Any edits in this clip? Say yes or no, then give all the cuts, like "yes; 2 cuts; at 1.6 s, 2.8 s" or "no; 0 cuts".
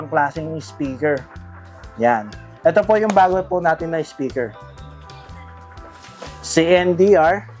no; 0 cuts